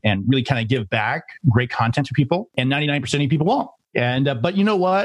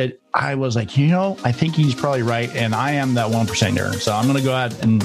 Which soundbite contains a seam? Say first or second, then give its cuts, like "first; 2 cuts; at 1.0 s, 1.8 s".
first; 2 cuts; at 2.5 s, 3.8 s